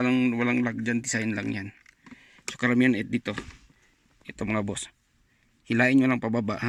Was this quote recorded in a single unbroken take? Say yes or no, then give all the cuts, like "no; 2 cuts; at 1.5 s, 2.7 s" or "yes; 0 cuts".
yes; 0 cuts